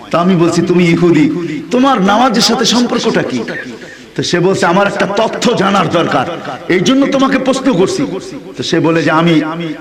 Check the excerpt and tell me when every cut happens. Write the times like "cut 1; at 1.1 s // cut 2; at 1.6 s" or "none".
none